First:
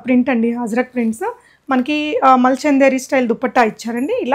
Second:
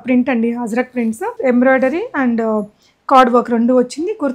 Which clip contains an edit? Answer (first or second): second